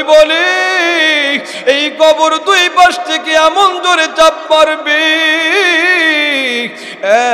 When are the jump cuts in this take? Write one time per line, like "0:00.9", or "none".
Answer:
none